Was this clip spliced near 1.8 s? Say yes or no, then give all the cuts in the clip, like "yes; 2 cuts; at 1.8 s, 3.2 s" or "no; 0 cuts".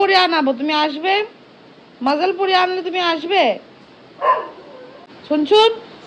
no; 1 cut; at 5.1 s